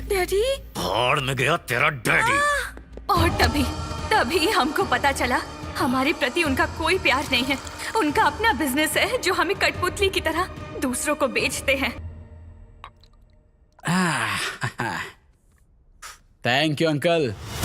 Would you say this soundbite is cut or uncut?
uncut